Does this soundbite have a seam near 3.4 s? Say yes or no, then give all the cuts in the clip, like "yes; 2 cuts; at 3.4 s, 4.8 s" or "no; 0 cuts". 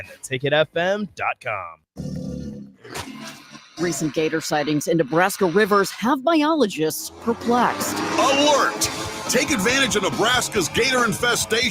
no; 1 cut; at 1.7 s